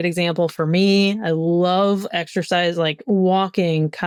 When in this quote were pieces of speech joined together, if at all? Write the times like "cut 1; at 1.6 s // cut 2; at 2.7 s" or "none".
none